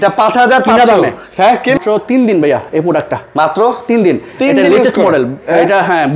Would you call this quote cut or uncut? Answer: cut